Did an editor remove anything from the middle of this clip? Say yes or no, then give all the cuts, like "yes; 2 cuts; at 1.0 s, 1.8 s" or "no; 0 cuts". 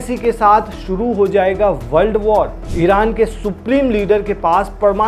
yes; 1 cut; at 2.7 s